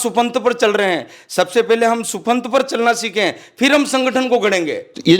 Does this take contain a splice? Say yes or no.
no